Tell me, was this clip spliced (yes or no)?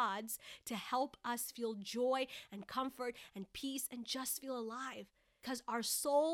yes